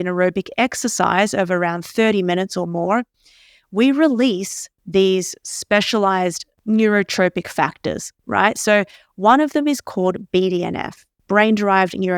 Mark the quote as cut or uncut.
cut